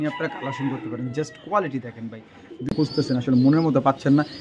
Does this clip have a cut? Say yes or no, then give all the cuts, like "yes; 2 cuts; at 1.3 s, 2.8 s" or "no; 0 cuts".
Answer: yes; 1 cut; at 2.7 s